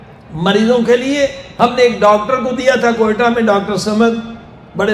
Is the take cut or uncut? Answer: cut